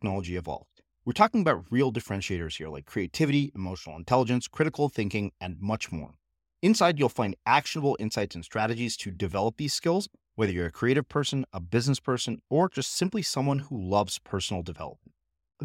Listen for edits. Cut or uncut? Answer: uncut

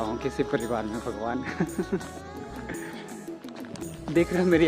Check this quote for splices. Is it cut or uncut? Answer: uncut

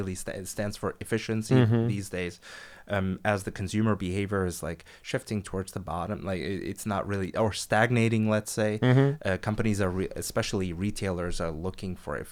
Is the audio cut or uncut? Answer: uncut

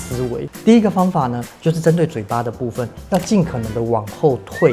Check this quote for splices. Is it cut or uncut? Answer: uncut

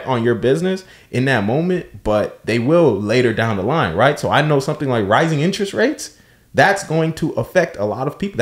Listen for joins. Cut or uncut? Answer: uncut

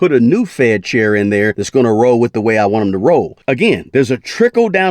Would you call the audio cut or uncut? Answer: cut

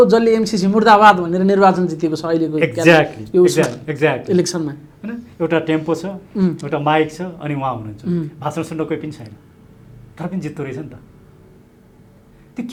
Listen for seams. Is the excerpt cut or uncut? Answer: uncut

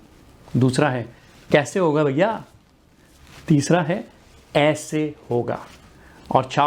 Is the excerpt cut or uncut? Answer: uncut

